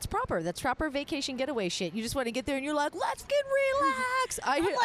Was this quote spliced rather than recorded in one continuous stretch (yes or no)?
yes